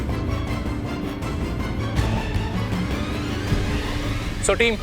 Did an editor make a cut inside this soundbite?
no; 0 cuts

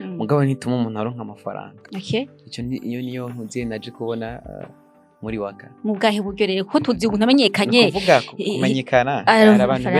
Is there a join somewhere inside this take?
no; 0 cuts

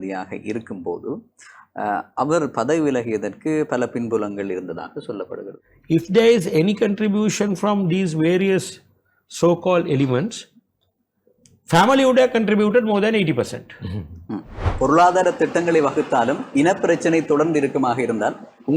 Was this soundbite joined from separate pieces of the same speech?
yes; 2 cuts; at 5.5 s, 14.6 s

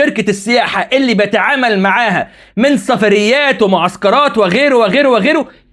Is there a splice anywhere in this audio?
no; 0 cuts

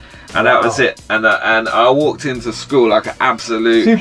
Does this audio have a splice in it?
no; 0 cuts

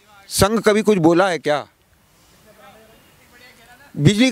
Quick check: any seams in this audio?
no; 0 cuts

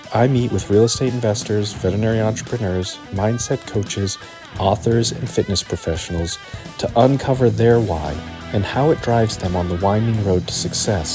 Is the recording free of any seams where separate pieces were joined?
yes; 0 cuts

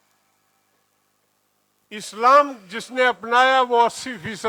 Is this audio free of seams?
yes; 0 cuts

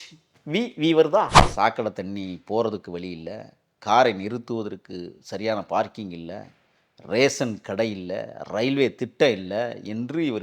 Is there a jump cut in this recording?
yes; 1 cut; at 1.4 s

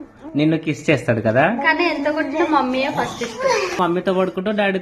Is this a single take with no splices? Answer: no; 1 cut; at 3.8 s

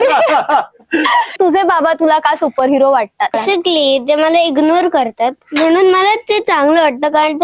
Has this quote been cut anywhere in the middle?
yes; 2 cuts; at 1.3 s, 3.4 s

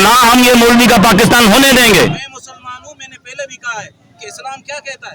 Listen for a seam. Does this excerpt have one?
yes; 1 cut; at 2.1 s

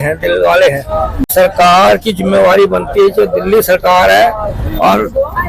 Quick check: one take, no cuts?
no; 1 cut; at 1.3 s

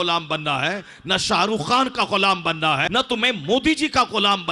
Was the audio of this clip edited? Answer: yes; 1 cut; at 2.8 s

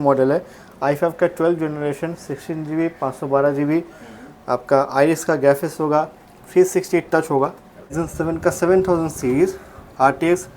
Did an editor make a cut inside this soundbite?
yes; 1 cut; at 7.9 s

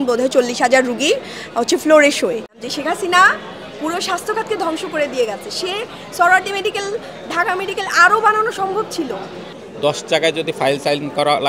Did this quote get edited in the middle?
yes; 2 cuts; at 2.5 s, 9.6 s

